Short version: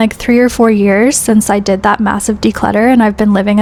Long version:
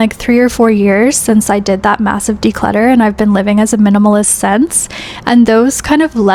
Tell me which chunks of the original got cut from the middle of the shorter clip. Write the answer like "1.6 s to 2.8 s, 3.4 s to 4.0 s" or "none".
none